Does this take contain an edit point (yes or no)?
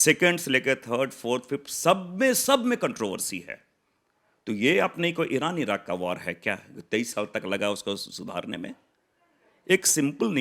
no